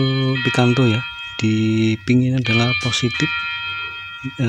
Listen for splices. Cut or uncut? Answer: uncut